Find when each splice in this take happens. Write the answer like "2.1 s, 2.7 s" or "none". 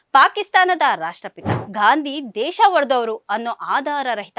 1.5 s